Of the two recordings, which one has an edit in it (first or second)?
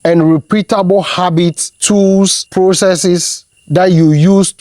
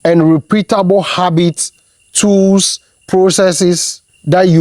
first